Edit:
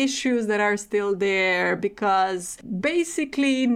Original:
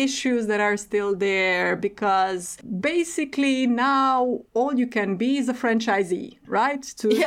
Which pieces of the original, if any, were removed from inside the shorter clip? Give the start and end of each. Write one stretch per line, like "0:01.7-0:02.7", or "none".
none